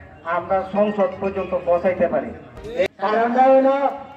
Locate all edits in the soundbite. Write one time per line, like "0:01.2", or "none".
0:02.9